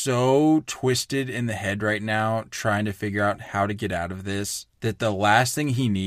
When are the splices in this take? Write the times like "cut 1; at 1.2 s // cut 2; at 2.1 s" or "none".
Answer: cut 1; at 4.6 s